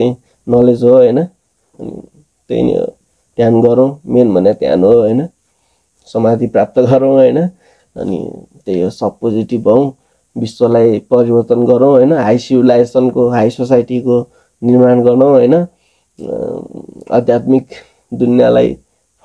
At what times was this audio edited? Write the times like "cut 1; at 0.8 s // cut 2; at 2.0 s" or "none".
none